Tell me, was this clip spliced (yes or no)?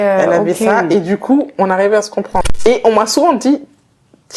yes